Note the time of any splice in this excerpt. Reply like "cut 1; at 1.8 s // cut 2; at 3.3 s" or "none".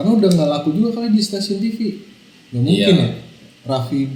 none

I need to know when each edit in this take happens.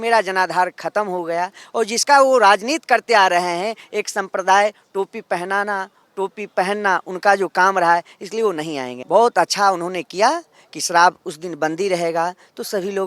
cut 1; at 8.9 s

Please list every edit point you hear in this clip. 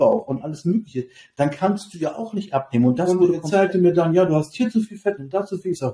cut 1; at 3.4 s

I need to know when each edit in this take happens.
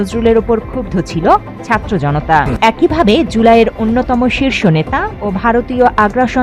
cut 1; at 2.5 s

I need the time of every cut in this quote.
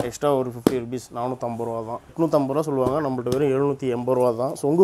cut 1; at 2.1 s

